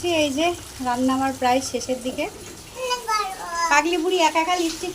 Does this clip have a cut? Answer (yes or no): yes